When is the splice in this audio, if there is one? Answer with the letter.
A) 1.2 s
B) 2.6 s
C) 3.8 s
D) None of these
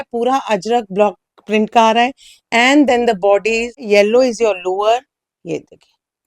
C